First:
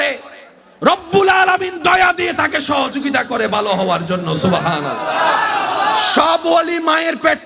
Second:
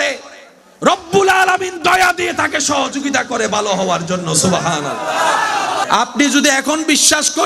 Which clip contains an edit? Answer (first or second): second